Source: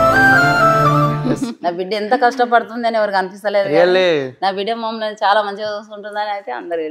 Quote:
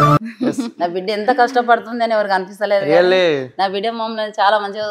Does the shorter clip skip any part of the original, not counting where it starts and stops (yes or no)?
no